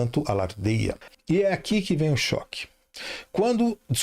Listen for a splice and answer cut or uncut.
cut